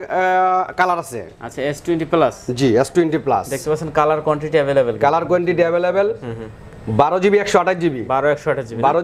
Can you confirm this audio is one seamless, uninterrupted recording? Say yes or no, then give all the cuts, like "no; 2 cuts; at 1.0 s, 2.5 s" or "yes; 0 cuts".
yes; 0 cuts